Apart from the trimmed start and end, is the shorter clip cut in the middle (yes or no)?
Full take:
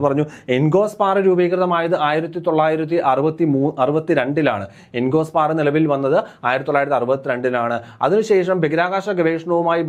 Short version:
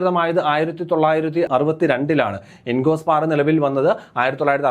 yes